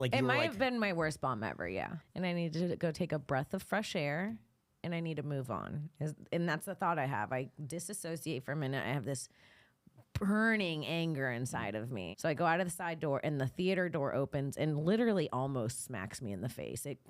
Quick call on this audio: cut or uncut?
cut